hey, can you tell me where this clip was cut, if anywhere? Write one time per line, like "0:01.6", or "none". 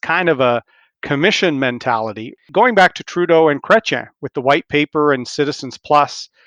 0:02.4